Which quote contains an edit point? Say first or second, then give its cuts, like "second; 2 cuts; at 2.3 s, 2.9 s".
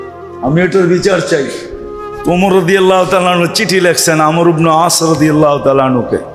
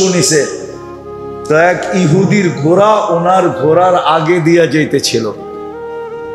second; 1 cut; at 5.4 s